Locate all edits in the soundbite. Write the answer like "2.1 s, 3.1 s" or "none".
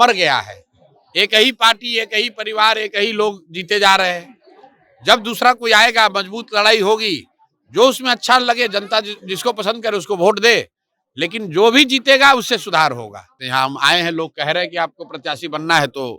13.4 s